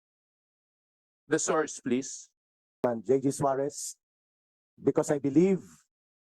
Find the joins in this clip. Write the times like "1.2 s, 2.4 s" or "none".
2.8 s